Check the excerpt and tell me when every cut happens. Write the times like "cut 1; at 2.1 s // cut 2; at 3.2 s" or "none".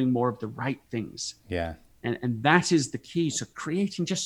none

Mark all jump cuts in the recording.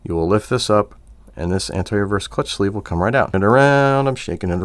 cut 1; at 3.3 s

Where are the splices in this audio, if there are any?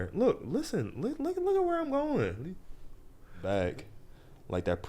cut 1; at 3.3 s

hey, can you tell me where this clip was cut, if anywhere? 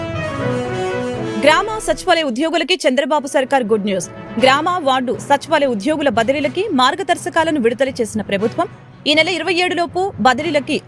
cut 1; at 1.2 s

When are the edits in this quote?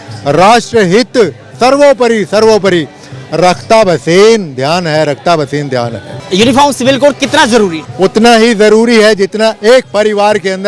cut 1; at 6.2 s // cut 2; at 7.8 s

